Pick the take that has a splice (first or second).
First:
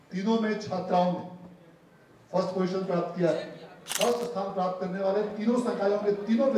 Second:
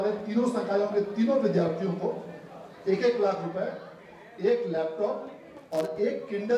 first